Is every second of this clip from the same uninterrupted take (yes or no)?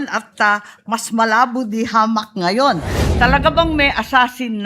no